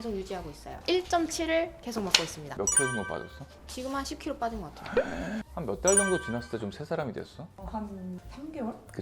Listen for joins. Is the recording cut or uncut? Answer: cut